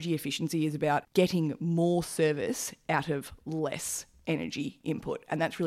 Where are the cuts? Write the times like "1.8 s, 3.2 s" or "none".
1.1 s